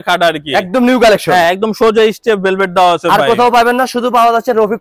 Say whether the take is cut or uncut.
uncut